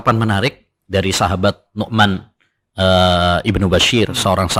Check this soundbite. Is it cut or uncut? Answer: uncut